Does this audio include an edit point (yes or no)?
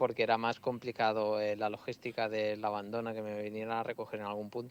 no